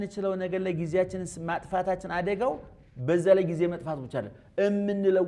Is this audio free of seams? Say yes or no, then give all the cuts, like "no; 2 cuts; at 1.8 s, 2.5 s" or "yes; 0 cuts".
yes; 0 cuts